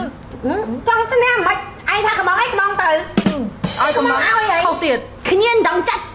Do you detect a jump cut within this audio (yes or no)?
yes